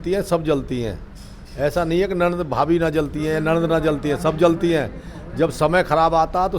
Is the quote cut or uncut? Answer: uncut